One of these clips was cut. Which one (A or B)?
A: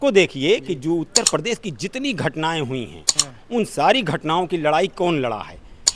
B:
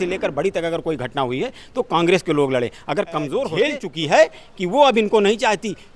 B